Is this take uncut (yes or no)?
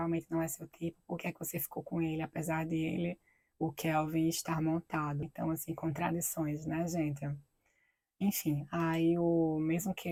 yes